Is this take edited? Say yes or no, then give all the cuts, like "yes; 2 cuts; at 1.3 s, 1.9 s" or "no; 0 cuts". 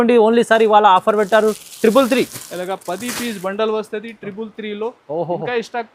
no; 0 cuts